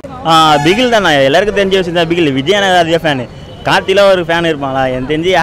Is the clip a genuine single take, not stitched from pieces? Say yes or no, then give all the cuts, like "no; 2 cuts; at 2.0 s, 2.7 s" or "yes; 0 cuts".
yes; 0 cuts